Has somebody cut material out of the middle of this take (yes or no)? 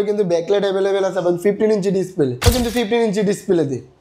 yes